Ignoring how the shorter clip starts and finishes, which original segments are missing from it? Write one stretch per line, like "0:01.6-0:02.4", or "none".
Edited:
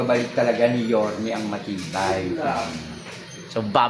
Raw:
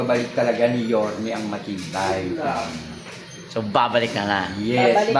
none